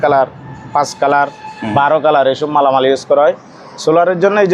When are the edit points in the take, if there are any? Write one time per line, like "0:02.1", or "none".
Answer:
none